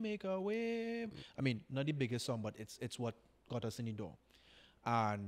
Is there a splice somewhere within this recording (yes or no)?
no